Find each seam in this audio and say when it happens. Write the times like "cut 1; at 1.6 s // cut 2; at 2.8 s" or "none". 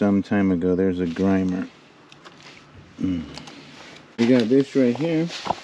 cut 1; at 4.2 s

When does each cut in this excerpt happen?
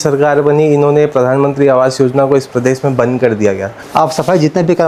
cut 1; at 3.7 s

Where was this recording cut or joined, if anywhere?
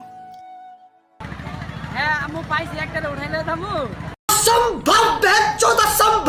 cut 1; at 4.3 s

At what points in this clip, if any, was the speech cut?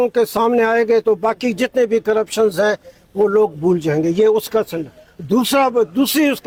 none

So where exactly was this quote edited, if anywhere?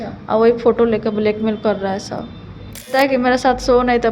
cut 1; at 2.9 s

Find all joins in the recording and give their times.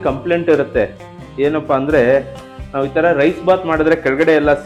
none

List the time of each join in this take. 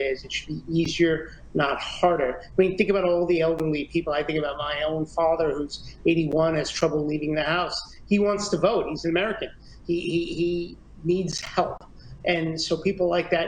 none

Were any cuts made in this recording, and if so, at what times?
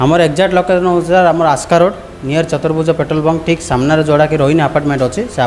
none

